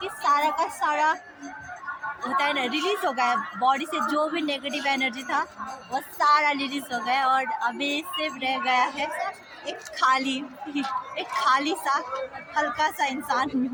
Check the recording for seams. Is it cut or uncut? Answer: uncut